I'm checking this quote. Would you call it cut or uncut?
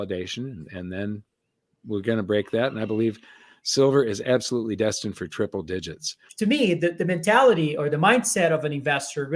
cut